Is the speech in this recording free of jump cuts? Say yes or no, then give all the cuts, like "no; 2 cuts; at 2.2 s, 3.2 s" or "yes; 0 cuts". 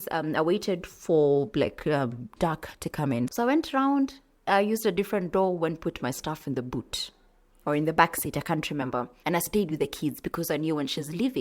no; 1 cut; at 3.3 s